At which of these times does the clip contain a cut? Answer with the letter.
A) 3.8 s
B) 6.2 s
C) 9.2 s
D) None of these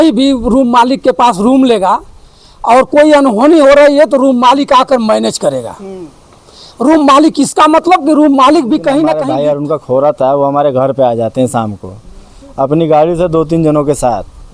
C